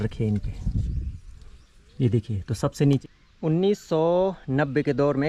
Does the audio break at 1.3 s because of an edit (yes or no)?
no